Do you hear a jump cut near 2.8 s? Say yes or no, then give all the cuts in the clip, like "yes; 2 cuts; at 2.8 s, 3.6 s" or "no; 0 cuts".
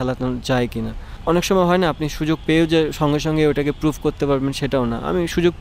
no; 1 cut; at 1.1 s